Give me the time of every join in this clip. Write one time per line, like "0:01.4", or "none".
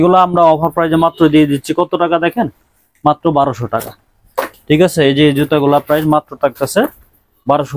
none